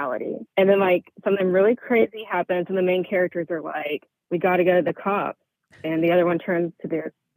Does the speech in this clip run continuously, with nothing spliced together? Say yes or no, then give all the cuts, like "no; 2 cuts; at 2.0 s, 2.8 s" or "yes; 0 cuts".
yes; 0 cuts